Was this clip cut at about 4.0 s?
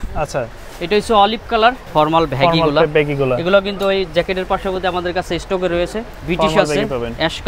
no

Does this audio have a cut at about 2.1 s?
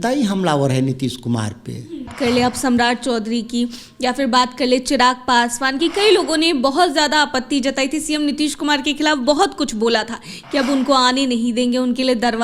yes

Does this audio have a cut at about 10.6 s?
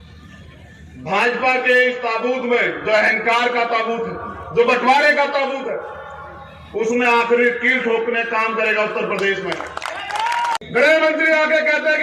yes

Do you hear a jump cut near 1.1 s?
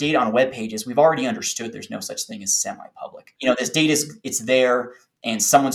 no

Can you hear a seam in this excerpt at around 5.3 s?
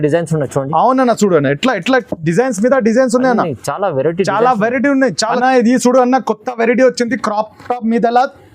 yes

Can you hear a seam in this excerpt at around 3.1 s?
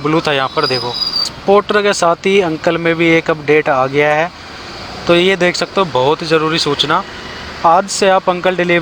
no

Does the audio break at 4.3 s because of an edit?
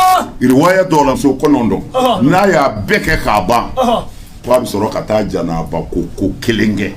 no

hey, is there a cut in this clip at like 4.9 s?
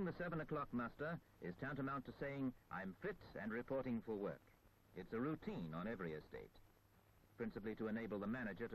no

